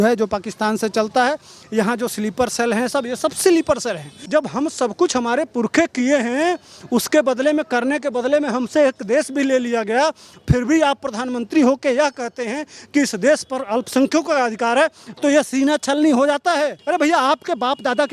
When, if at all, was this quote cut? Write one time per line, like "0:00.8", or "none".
0:04.1
0:16.8